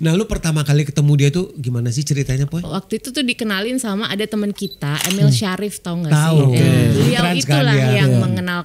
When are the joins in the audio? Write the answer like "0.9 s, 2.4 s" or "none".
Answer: 2.7 s, 7.0 s